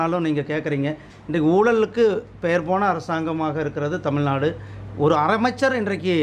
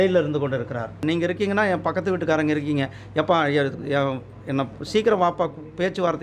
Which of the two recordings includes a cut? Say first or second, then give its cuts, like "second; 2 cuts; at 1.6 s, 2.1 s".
second; 1 cut; at 1.0 s